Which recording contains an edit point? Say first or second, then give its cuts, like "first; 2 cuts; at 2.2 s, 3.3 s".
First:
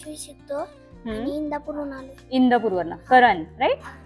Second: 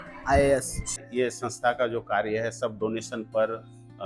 second; 1 cut; at 1.0 s